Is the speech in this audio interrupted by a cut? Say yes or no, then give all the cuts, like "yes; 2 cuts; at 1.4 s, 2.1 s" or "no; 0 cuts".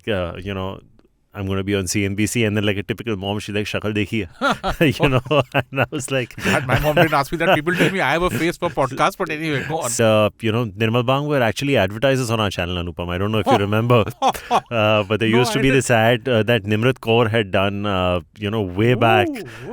yes; 1 cut; at 9.9 s